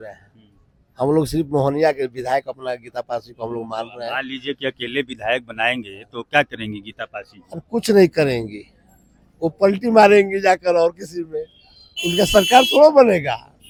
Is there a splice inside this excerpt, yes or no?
no